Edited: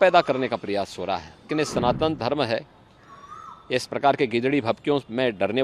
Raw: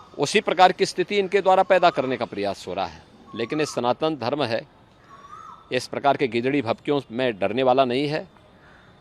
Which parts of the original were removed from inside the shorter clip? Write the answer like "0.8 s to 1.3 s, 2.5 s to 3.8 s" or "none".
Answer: 3.1 s to 3.4 s

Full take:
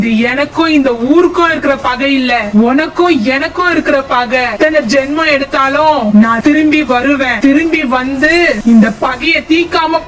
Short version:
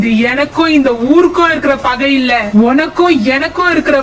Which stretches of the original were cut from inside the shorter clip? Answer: none

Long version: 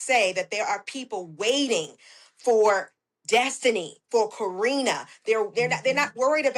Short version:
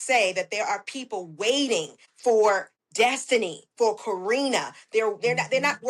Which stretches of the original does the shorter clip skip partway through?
2.0 s to 2.2 s, 3.0 s to 3.1 s

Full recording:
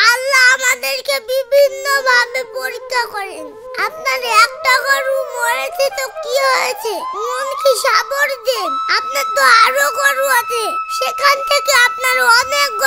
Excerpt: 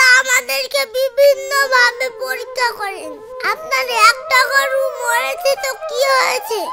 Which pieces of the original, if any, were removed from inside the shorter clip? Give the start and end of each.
none

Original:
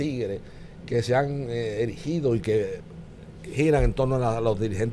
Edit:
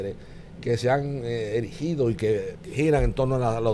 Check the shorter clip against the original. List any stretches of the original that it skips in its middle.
2.8 s to 3.4 s

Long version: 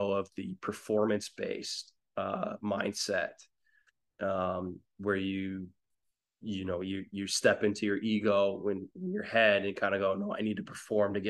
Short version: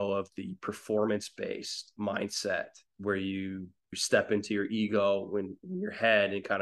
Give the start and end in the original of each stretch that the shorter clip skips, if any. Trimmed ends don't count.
1.9 s to 2.6 s, 3.5 s to 4.9 s, 6.0 s to 7.3 s

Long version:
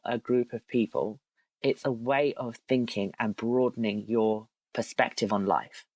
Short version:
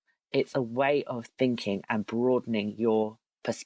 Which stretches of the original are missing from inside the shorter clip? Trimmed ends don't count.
none

